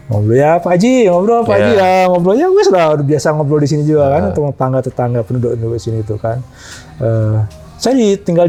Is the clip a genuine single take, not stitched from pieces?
yes; 0 cuts

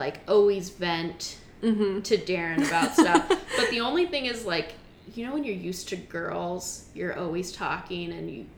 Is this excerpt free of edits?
yes; 0 cuts

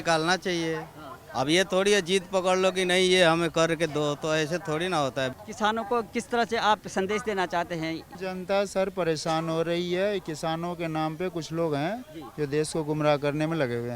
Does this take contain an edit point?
yes; 2 cuts; at 5.3 s, 8.1 s

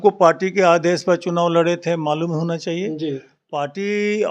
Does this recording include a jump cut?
no; 0 cuts

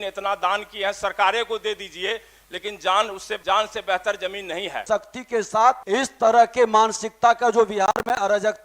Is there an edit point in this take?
yes; 3 cuts; at 3.3 s, 4.8 s, 5.8 s

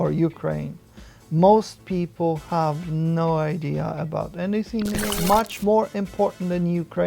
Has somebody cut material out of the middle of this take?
yes; 1 cut; at 5.1 s

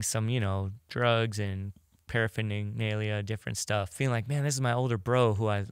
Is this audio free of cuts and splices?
no; 1 cut; at 3.9 s

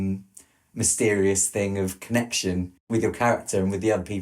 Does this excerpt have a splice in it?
yes; 1 cut; at 2.9 s

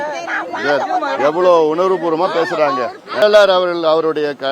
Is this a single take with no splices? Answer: no; 1 cut; at 3.2 s

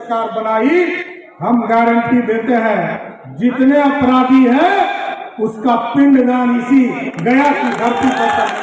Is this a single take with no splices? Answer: yes; 0 cuts

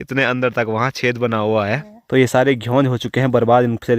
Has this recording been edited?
yes; 1 cut; at 1.9 s

